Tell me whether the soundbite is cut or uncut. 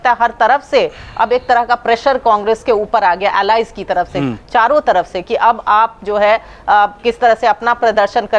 uncut